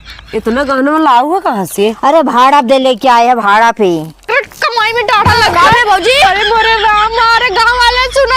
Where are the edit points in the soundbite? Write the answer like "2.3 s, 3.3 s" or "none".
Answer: 4.2 s